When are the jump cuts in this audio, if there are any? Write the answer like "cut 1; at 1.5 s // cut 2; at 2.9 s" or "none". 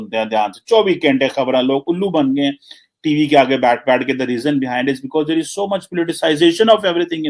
none

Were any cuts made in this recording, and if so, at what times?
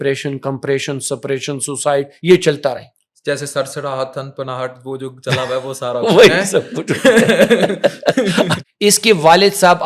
cut 1; at 8.6 s

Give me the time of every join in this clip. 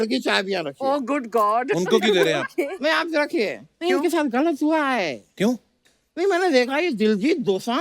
cut 1; at 5.8 s

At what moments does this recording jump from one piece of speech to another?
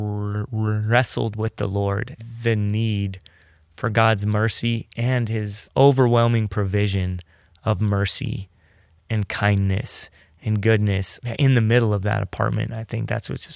cut 1; at 2.1 s // cut 2; at 5.6 s // cut 3; at 11.1 s

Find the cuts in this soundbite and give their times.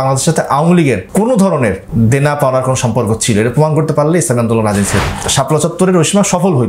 cut 1; at 1.0 s // cut 2; at 1.8 s // cut 3; at 4.9 s

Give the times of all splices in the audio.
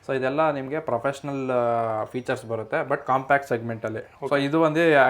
cut 1; at 4.1 s

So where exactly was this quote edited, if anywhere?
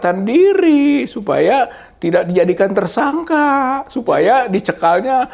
none

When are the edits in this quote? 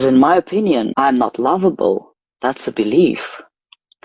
cut 1; at 0.9 s

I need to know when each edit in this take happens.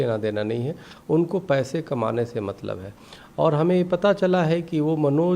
none

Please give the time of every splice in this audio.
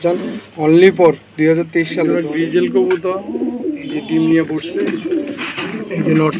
cut 1; at 1.9 s

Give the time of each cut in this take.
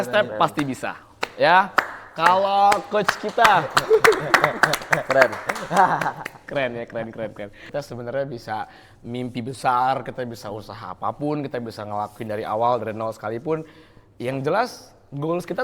cut 1; at 7.6 s

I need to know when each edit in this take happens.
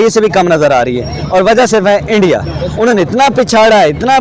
none

